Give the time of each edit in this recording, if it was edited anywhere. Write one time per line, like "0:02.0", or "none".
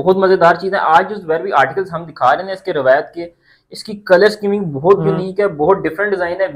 none